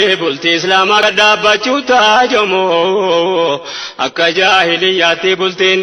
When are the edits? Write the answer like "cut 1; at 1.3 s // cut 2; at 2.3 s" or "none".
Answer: cut 1; at 1.0 s